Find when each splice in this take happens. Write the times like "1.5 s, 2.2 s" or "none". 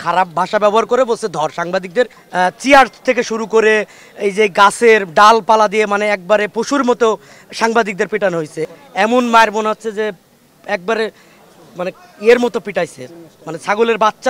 2.2 s, 8.7 s